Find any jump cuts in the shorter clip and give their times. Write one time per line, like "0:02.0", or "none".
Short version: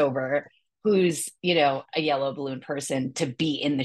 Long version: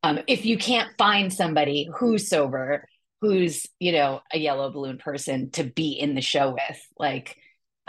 none